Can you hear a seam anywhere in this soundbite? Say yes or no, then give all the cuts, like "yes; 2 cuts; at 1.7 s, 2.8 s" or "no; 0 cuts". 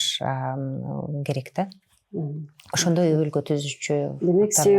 no; 0 cuts